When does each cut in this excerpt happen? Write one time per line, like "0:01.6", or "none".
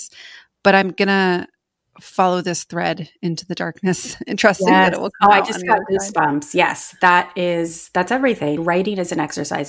0:08.6